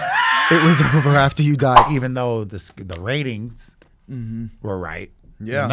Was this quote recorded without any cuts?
no; 1 cut; at 1.9 s

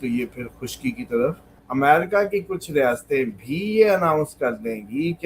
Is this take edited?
yes; 1 cut; at 1.5 s

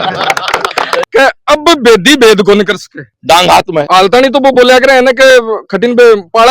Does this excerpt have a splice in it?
yes; 2 cuts; at 1.1 s, 3.9 s

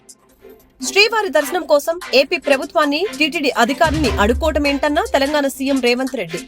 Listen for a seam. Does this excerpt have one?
yes; 1 cut; at 0.9 s

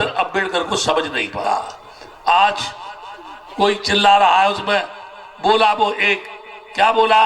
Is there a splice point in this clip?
yes; 1 cut; at 1.4 s

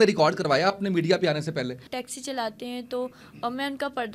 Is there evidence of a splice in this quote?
yes; 1 cut; at 1.9 s

